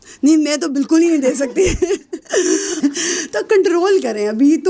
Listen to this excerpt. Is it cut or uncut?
cut